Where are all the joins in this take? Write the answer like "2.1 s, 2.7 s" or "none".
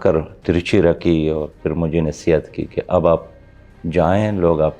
none